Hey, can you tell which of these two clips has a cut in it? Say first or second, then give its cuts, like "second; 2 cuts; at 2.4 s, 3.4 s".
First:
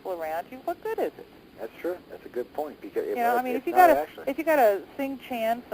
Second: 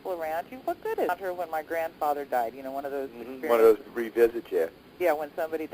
first; 1 cut; at 1.1 s